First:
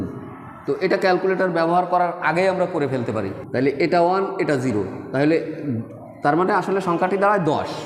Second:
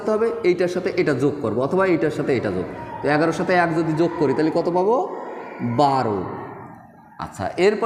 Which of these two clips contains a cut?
first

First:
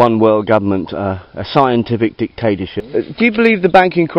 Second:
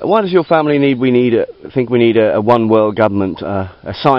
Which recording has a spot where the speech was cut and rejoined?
first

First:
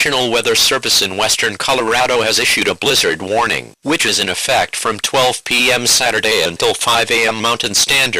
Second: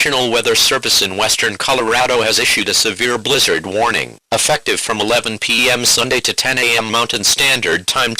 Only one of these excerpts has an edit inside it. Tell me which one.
first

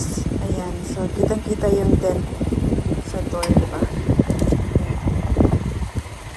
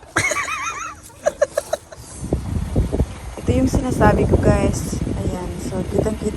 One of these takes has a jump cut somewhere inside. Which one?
second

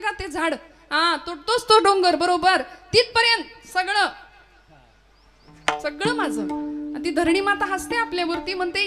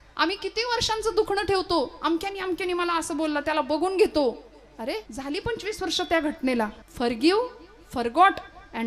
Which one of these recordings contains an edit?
second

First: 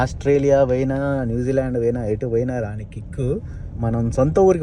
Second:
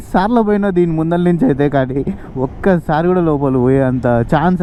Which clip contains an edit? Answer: first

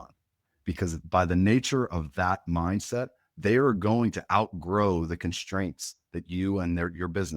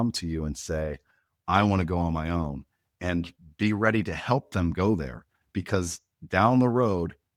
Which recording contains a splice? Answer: first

